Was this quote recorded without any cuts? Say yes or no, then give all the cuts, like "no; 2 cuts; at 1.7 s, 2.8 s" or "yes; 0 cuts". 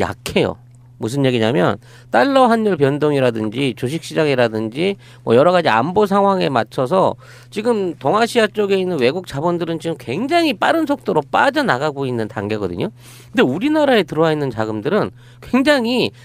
yes; 0 cuts